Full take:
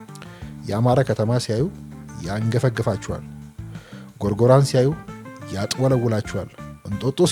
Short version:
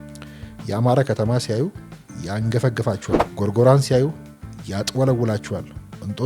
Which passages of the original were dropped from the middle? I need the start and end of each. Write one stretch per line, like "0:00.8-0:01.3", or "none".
0:03.2-0:04.1